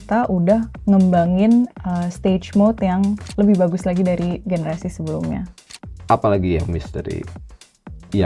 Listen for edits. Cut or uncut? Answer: cut